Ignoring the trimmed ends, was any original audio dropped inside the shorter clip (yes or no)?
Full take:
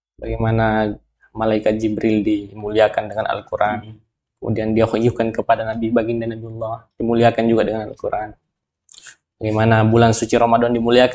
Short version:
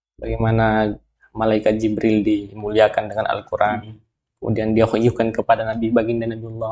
no